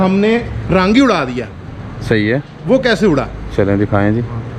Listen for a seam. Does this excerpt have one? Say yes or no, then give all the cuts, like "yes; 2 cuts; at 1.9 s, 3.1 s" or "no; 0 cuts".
no; 0 cuts